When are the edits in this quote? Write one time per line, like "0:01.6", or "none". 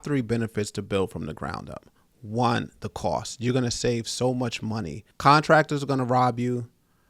0:05.0

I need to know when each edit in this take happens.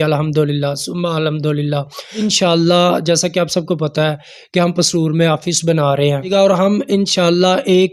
0:02.3
0:06.3

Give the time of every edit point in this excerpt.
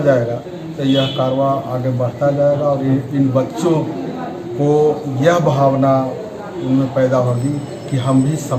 none

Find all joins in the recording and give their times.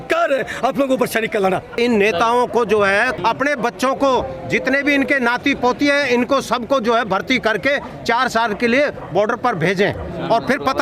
0:01.8
0:03.1

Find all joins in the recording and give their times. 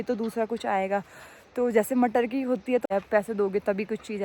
0:02.9

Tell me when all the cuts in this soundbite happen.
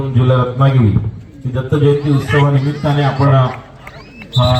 none

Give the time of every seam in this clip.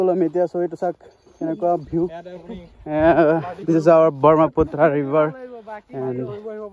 none

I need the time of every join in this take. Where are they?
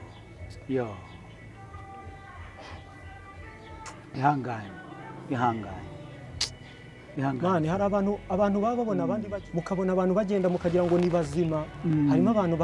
0:09.2

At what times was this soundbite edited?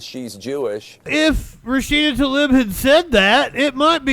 0:01.1

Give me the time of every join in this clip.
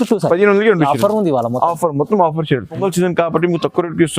0:02.8

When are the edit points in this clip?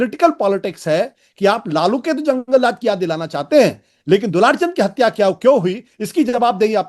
none

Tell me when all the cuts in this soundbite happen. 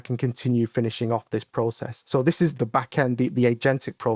0:02.5

